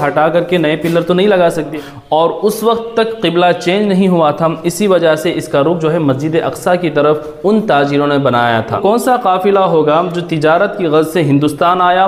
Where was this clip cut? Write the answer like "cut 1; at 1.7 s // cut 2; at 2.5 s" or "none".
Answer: cut 1; at 1.8 s // cut 2; at 8.8 s